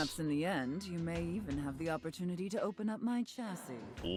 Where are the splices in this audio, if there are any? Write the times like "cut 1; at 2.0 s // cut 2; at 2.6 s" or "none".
none